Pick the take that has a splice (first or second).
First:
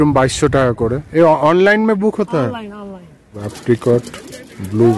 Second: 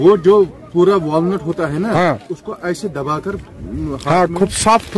first